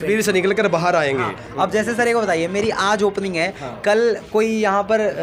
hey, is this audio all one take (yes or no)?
yes